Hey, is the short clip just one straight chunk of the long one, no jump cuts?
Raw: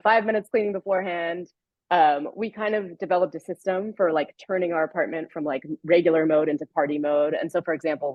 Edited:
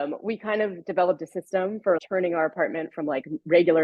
no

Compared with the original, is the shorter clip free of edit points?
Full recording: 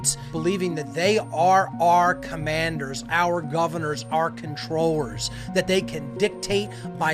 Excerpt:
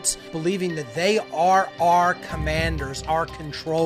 no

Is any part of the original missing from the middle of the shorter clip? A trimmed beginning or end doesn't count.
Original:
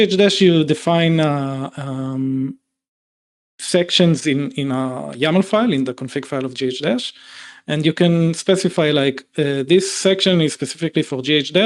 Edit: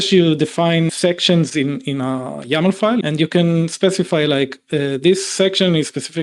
yes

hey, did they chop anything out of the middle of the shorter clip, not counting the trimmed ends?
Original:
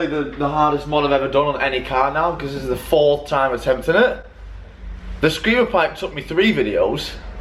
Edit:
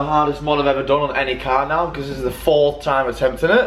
no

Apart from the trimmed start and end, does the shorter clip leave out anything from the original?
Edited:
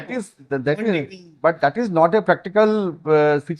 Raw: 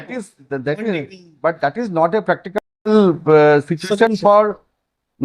yes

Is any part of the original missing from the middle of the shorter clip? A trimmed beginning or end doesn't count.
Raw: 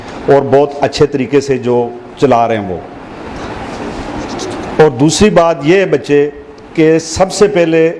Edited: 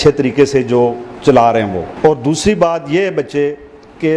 yes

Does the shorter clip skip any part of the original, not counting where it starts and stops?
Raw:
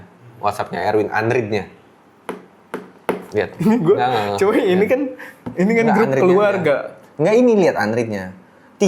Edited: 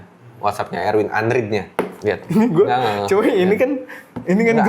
yes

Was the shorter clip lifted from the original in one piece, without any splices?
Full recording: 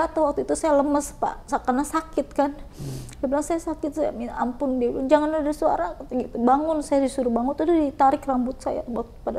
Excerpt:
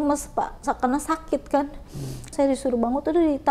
no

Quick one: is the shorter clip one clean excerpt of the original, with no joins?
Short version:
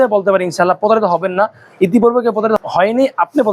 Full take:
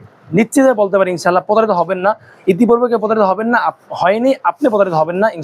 no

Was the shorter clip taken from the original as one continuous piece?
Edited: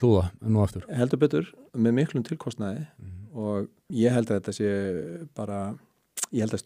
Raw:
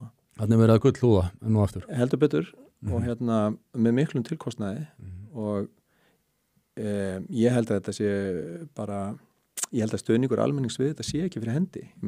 no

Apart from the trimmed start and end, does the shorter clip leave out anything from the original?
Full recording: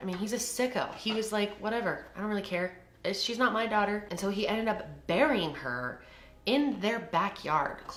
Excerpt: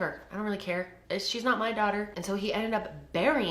yes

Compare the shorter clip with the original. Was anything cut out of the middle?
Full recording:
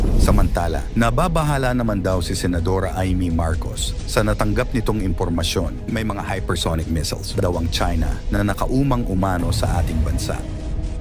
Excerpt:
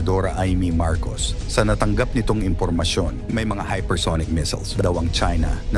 no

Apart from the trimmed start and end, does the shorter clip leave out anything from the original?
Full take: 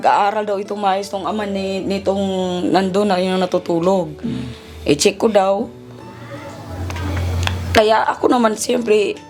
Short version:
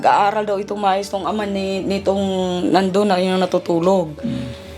no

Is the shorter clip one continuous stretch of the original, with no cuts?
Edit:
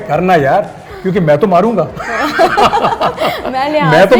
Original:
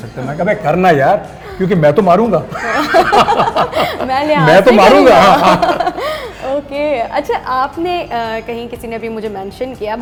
yes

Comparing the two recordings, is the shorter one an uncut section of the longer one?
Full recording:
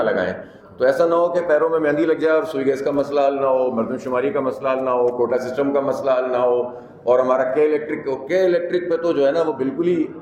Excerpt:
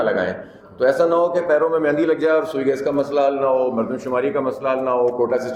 yes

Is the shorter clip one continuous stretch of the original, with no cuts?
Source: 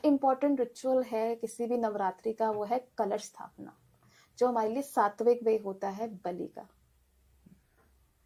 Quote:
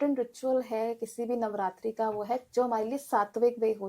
no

